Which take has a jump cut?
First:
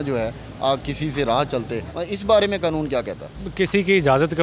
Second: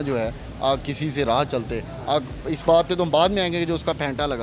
first; 2 cuts; at 1.9 s, 3.4 s

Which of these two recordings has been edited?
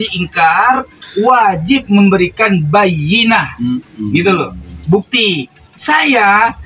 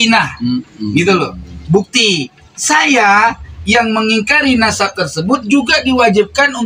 first; 1 cut; at 1.0 s

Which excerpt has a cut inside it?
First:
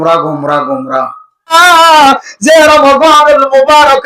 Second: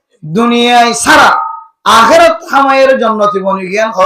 first; 1 cut; at 1.5 s

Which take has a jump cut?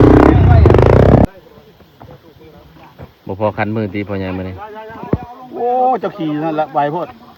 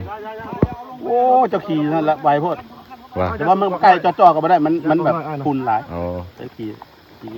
first; 1 cut; at 1.2 s

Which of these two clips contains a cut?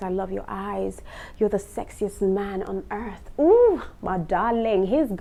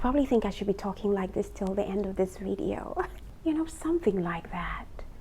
second; 1 cut; at 3.2 s

